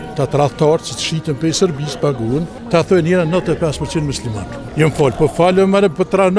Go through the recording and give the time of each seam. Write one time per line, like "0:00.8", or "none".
0:02.6
0:04.6